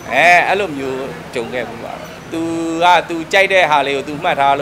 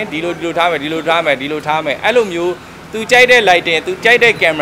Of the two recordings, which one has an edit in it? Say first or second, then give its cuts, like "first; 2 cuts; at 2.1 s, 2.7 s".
first; 1 cut; at 2.1 s